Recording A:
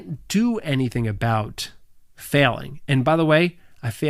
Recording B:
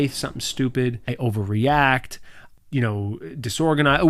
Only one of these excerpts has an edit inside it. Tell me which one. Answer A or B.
B